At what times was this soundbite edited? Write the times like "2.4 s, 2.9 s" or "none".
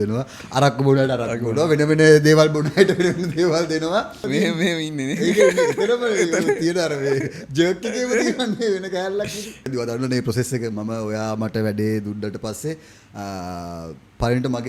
4.2 s, 9.7 s